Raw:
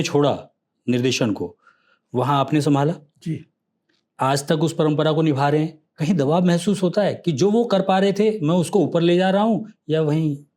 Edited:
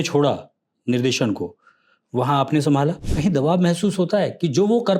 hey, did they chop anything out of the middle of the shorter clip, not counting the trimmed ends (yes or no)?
yes